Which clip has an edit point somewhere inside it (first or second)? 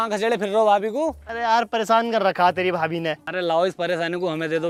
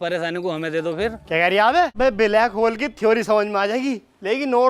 second